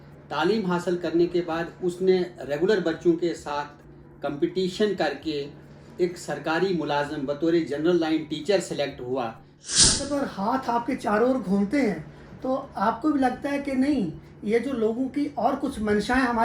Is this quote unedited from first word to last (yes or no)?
no